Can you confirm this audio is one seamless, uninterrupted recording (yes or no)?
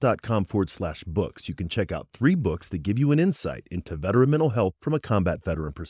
yes